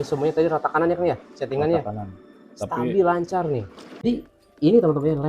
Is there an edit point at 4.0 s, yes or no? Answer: yes